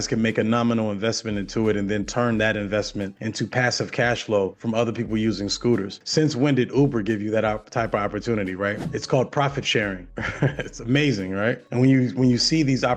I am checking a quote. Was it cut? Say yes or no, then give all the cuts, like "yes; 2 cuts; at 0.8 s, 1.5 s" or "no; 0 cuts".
no; 0 cuts